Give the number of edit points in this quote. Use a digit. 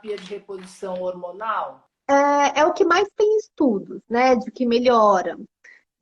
1